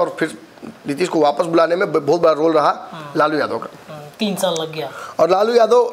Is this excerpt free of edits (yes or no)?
yes